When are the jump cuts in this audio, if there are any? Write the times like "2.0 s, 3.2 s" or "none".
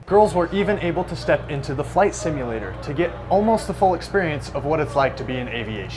none